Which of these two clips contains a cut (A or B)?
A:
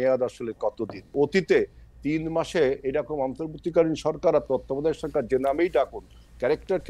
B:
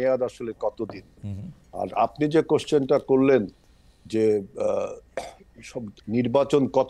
A